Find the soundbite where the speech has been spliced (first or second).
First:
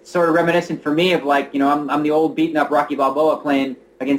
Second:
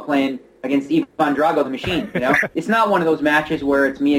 second